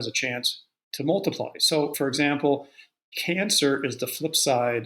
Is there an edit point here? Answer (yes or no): yes